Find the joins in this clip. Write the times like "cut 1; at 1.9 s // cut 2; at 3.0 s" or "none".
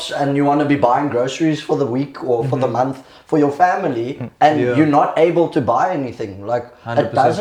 none